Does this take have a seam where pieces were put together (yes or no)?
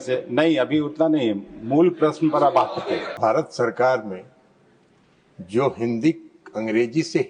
yes